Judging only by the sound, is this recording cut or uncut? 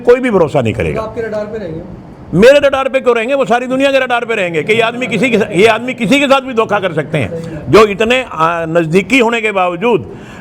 uncut